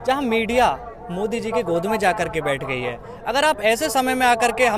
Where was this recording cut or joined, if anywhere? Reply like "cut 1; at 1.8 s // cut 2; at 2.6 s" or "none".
none